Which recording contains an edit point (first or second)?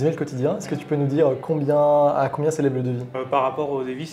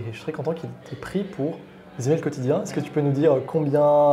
first